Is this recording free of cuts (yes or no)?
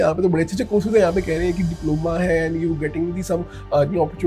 yes